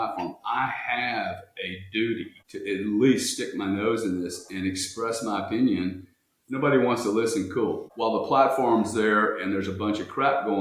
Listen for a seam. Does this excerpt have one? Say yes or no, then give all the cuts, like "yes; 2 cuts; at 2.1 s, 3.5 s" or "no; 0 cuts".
yes; 2 cuts; at 2.4 s, 7.9 s